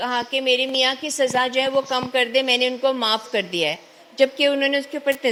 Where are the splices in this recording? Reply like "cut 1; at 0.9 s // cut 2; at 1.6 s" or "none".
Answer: none